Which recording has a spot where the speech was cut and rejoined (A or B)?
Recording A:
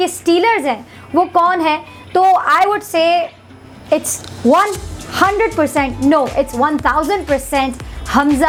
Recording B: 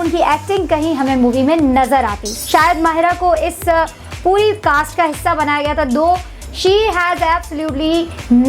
B